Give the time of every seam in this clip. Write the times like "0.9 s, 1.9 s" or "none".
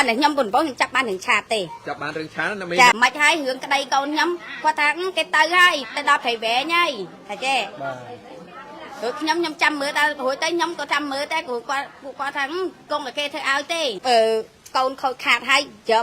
2.9 s, 14.0 s